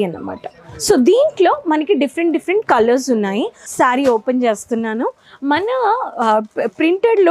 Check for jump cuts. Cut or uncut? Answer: cut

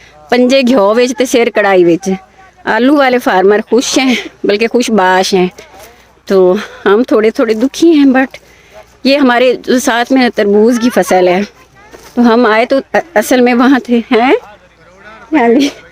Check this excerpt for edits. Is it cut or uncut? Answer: uncut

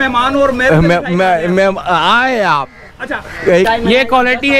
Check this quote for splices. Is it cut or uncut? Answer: cut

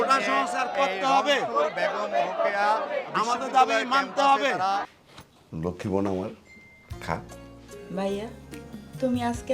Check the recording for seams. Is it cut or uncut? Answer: cut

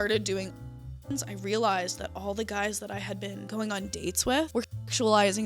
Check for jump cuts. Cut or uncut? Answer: cut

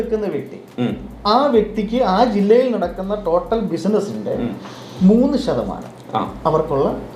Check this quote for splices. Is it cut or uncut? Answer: uncut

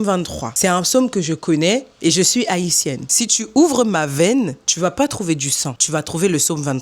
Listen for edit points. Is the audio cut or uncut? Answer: uncut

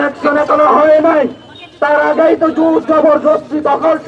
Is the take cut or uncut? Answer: uncut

